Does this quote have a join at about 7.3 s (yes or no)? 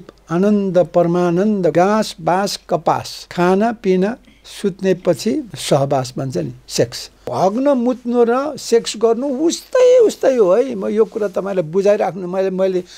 yes